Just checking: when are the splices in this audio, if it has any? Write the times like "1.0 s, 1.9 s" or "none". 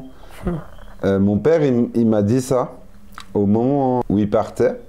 none